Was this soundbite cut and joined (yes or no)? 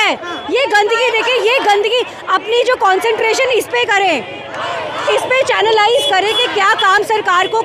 no